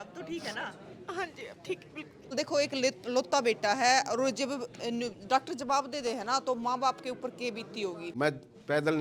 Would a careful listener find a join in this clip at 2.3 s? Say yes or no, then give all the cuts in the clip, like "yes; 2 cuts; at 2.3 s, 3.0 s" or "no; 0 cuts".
yes; 2 cuts; at 2.3 s, 8.0 s